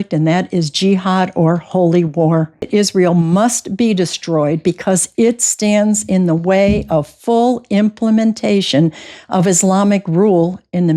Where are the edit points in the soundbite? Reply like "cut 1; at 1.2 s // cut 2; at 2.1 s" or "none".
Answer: cut 1; at 2.7 s